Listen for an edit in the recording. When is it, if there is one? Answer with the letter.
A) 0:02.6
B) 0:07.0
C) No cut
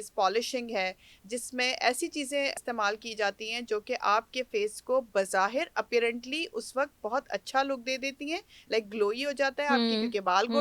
A